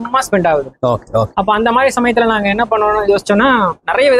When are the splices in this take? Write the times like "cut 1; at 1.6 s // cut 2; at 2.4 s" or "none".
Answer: none